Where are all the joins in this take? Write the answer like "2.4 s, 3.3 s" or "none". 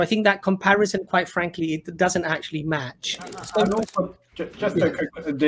3.4 s